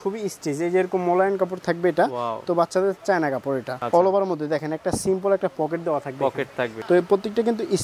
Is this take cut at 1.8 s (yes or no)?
no